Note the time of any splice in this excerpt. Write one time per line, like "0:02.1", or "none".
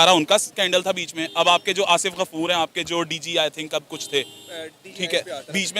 none